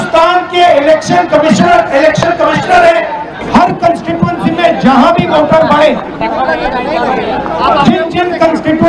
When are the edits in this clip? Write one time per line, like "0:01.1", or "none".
0:03.4